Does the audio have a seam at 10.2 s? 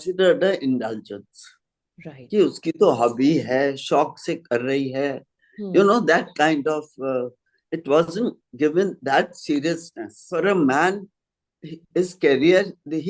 yes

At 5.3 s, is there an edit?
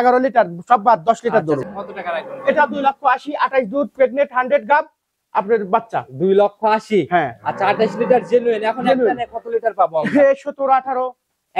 no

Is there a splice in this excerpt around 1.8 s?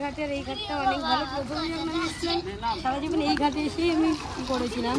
no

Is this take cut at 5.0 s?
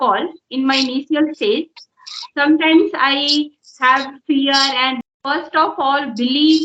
yes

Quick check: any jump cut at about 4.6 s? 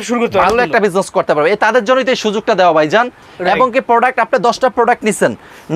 no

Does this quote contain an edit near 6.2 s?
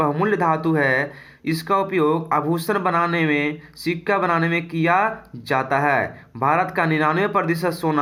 no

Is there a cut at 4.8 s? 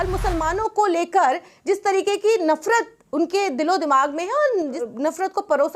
yes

